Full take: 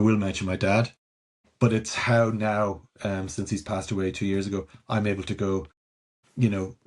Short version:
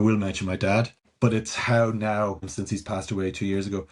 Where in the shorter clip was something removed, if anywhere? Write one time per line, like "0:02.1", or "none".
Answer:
0:01.0
0:02.5